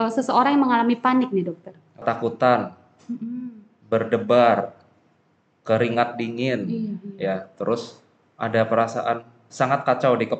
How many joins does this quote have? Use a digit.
1